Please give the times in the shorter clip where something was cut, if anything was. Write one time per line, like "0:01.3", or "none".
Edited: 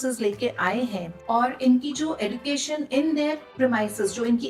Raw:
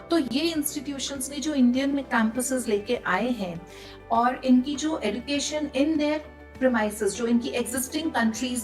0:01.1
0:03.5